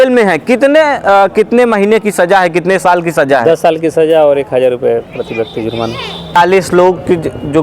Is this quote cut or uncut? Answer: cut